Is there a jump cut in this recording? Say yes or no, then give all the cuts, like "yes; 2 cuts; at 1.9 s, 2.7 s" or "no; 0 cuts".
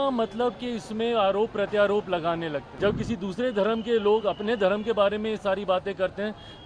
yes; 1 cut; at 2.7 s